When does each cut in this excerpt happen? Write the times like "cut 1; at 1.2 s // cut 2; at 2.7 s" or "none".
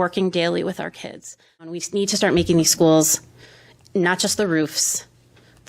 cut 1; at 1.7 s